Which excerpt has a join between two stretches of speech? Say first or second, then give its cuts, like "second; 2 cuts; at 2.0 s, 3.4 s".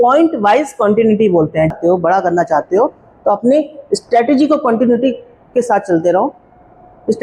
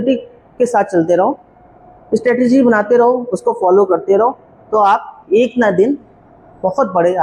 first; 1 cut; at 1.7 s